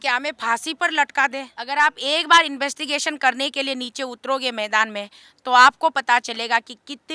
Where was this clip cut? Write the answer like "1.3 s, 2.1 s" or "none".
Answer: 1.5 s